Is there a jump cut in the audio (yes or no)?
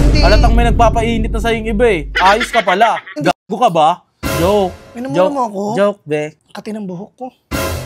yes